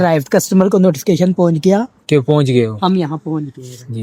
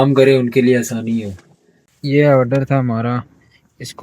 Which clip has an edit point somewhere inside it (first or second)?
second